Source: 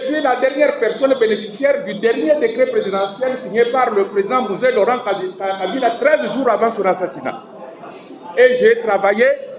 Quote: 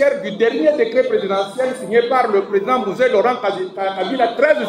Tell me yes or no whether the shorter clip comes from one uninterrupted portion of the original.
yes